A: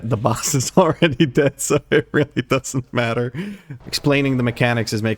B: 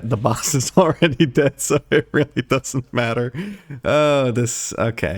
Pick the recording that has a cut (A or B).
A